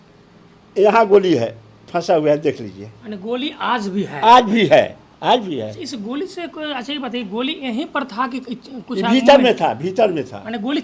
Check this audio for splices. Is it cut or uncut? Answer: uncut